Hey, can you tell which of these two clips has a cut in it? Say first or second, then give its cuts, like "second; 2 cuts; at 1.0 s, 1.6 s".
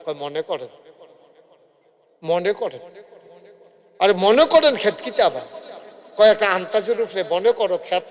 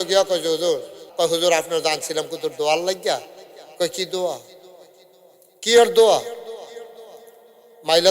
second; 1 cut; at 1.0 s